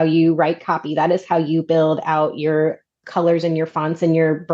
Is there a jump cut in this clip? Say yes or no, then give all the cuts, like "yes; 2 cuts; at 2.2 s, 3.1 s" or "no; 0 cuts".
yes; 1 cut; at 3.0 s